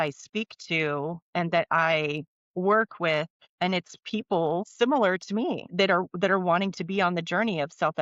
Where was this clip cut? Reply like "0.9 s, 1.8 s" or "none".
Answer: 3.4 s, 4.7 s, 5.7 s